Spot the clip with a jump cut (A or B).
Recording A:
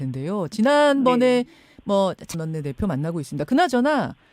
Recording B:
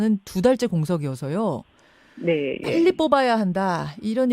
A